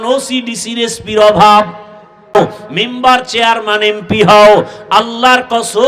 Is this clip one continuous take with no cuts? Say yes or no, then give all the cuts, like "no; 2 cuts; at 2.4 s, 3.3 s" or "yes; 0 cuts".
no; 1 cut; at 2.3 s